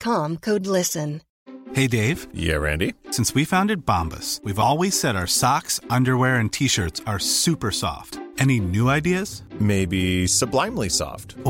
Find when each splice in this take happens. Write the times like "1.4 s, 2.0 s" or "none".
1.3 s